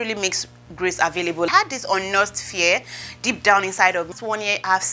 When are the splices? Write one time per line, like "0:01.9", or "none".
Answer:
0:01.5
0:04.1